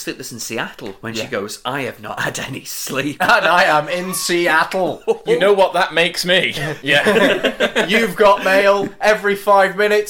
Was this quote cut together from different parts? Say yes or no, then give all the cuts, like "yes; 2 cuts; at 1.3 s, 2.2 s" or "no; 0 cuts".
yes; 1 cut; at 6.7 s